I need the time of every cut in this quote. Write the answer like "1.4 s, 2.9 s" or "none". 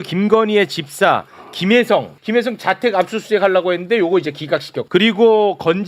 2.2 s, 4.8 s